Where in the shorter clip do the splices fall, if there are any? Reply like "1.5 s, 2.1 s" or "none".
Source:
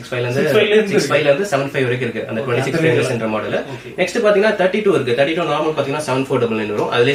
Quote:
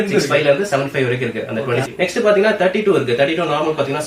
1.9 s